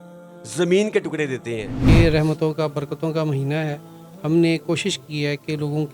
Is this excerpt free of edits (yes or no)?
no